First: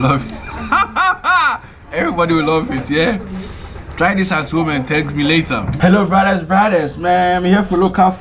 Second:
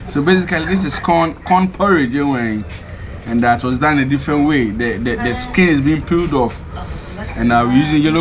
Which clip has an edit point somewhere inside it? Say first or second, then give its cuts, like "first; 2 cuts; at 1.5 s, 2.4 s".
first; 1 cut; at 5.7 s